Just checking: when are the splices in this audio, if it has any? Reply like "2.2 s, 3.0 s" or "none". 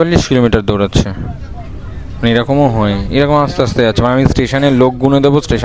none